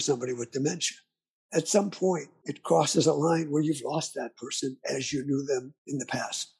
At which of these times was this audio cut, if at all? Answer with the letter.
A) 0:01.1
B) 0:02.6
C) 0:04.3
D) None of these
D